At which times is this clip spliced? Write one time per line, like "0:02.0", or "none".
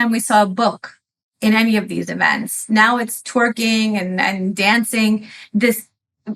0:05.4